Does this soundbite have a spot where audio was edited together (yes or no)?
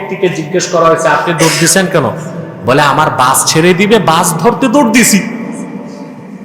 no